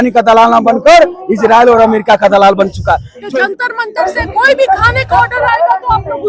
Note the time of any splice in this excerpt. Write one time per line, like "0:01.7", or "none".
0:03.2